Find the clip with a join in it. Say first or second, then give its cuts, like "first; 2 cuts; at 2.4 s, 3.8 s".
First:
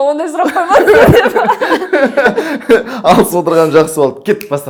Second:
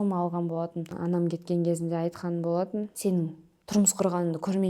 second; 2 cuts; at 0.9 s, 2.9 s